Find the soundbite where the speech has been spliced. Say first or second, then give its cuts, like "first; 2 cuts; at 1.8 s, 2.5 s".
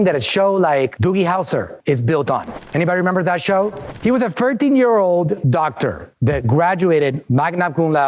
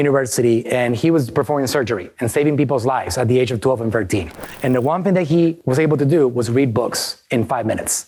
first; 1 cut; at 3.9 s